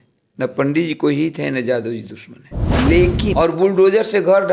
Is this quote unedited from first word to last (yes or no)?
no